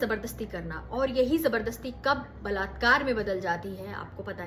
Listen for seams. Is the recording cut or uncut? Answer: uncut